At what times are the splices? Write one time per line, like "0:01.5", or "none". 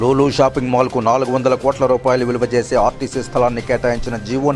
none